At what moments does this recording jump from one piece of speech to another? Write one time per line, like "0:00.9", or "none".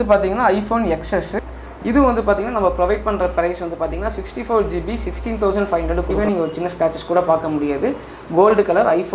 0:01.5
0:06.2